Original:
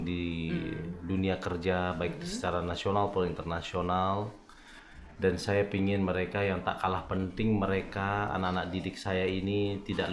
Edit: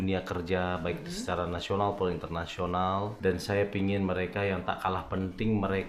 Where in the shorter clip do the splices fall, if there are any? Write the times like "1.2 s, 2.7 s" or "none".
3.1 s